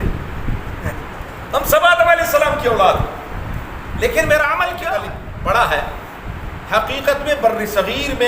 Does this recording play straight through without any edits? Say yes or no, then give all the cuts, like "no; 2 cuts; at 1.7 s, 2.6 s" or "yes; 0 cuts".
no; 1 cut; at 5.0 s